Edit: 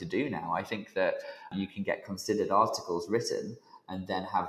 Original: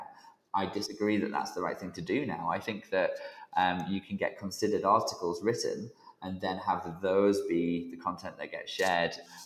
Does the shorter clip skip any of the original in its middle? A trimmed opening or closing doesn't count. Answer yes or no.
yes